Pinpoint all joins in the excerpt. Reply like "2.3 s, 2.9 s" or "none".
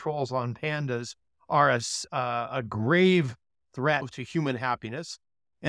2.0 s, 4.2 s